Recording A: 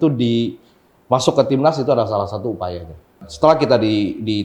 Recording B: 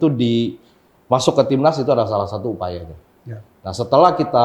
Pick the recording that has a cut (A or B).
A